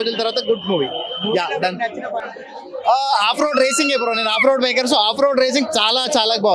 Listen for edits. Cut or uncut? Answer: uncut